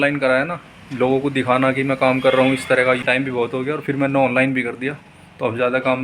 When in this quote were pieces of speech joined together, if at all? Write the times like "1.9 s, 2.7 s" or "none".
3.1 s